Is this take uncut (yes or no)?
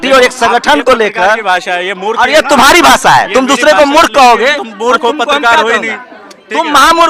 yes